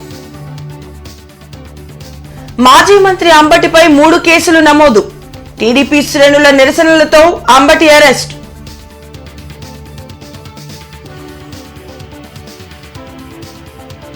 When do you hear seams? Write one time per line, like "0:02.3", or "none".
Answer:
0:01.2